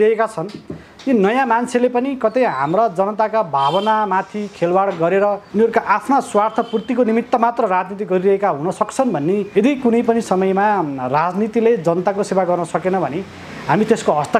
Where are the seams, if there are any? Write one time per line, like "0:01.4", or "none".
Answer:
0:05.4
0:09.5